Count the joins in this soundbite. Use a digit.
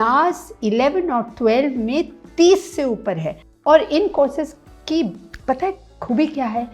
1